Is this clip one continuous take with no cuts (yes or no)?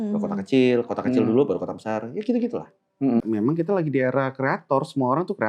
no